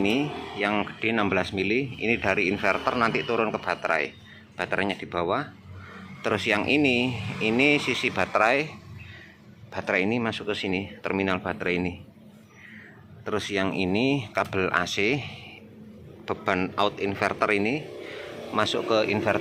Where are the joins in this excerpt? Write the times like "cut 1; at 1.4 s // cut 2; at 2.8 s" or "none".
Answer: none